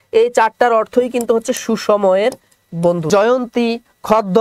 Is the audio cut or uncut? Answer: cut